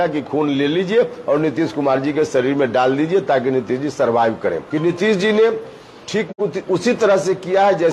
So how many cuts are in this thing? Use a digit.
1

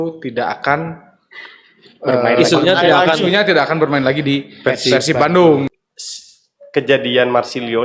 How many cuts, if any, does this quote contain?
1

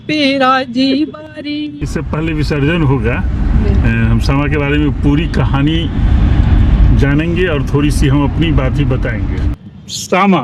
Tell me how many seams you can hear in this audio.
2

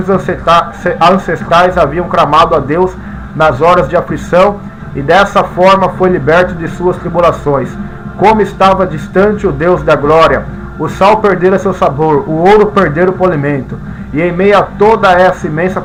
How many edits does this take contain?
0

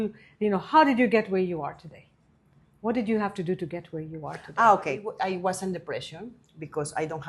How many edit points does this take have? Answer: 1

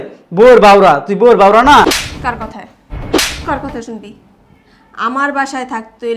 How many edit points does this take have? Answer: 1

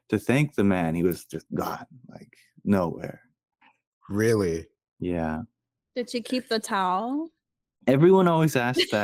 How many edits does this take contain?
0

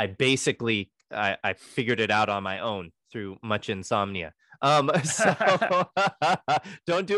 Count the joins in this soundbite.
0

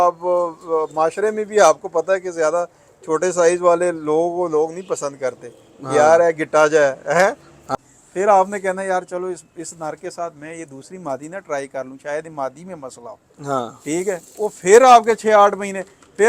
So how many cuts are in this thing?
1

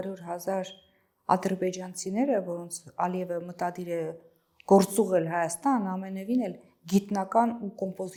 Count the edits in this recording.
0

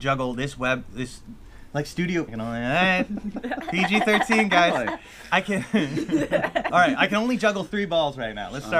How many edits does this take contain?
1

